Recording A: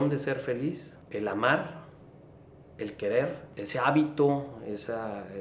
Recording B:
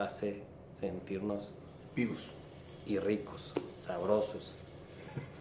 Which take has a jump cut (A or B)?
A